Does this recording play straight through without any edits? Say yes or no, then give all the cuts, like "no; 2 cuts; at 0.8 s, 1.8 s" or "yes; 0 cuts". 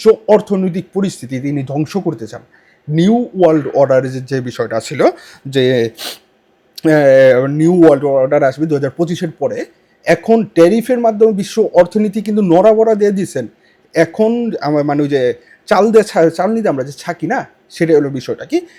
yes; 0 cuts